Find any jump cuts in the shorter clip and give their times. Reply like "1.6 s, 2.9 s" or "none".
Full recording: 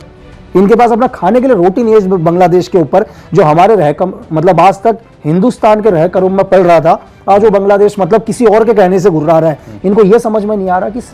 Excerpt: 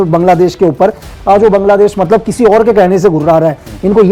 1.1 s